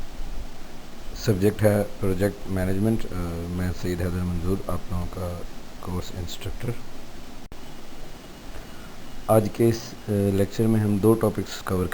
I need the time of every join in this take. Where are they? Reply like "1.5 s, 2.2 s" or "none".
7.5 s